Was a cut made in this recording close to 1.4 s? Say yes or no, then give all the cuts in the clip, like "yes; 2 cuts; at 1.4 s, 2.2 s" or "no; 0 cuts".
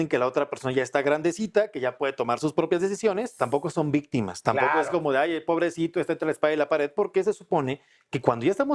no; 1 cut; at 3.3 s